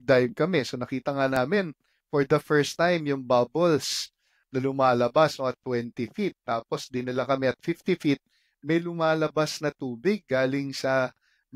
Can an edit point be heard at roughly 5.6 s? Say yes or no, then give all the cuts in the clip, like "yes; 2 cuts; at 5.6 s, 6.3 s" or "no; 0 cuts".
no; 0 cuts